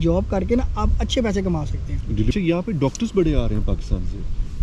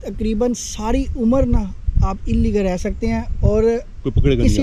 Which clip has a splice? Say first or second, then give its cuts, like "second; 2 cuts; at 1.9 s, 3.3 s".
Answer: first; 1 cut; at 2.3 s